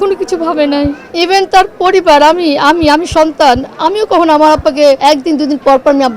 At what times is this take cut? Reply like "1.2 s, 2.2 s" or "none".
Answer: 1.0 s, 5.0 s